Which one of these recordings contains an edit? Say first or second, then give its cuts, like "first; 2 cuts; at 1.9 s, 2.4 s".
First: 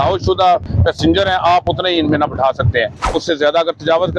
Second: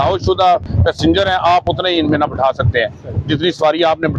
first; 1 cut; at 3.1 s